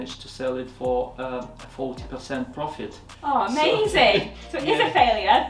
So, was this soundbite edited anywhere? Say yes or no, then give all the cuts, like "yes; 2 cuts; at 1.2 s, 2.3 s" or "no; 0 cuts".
no; 0 cuts